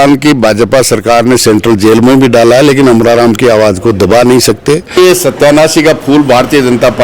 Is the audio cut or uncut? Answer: cut